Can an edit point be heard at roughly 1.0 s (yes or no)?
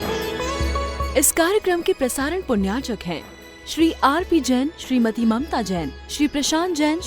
yes